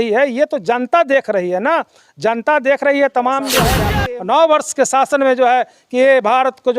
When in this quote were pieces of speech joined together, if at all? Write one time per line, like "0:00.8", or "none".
0:03.8

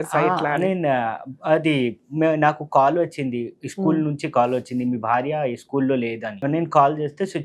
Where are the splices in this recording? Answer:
0:06.4

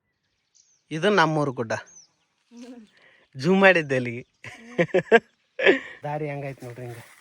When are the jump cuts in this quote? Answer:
0:05.9

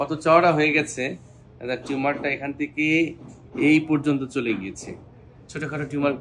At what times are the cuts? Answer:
0:05.3

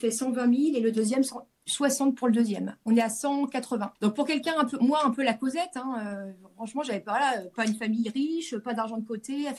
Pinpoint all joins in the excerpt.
0:02.8
0:03.9

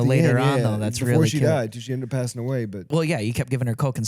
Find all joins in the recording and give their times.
0:02.9

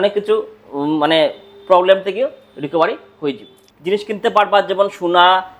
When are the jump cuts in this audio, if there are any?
0:03.6

